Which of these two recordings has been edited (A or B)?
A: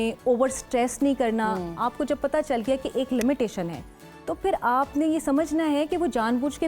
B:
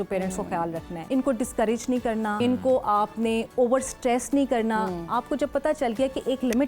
B